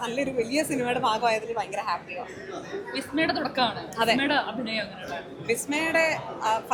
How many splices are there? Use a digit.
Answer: 0